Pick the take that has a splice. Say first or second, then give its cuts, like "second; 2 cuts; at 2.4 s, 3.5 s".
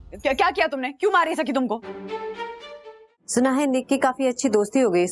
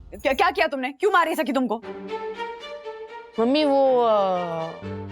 first; 1 cut; at 3.1 s